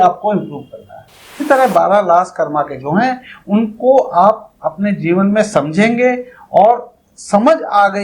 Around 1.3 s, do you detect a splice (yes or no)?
yes